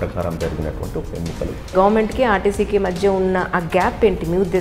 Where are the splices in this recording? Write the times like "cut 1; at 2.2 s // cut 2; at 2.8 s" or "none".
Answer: cut 1; at 1.7 s